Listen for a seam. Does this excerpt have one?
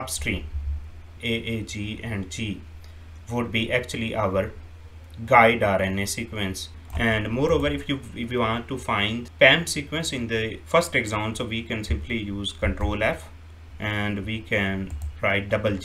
yes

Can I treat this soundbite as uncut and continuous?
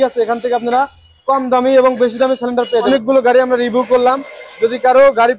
no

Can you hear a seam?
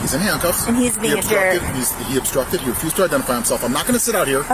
no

